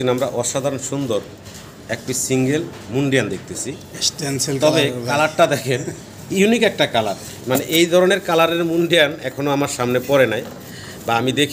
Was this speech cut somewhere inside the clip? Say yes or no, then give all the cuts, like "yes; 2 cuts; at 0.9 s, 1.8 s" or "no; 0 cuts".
no; 0 cuts